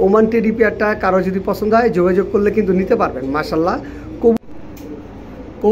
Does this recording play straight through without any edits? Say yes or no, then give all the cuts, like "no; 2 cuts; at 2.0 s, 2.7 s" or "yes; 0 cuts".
no; 1 cut; at 4.4 s